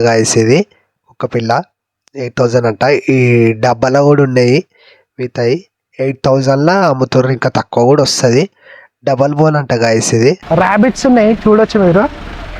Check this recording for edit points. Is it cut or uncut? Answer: cut